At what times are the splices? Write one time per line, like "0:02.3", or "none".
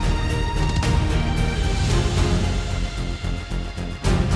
none